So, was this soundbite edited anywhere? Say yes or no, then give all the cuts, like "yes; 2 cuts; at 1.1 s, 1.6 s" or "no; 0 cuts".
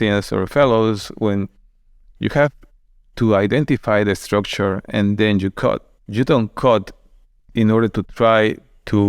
no; 0 cuts